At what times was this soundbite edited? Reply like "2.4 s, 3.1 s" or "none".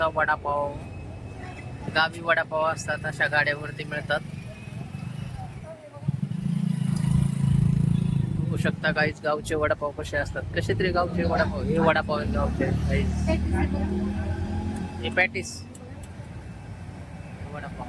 none